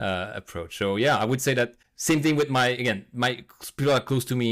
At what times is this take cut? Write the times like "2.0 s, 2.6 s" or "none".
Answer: 1.9 s